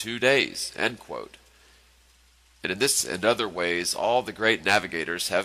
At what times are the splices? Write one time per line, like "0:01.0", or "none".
0:01.4